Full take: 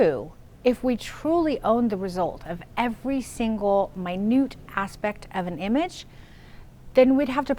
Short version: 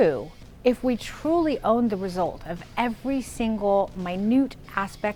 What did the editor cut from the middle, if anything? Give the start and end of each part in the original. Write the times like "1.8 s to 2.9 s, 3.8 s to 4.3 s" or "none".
none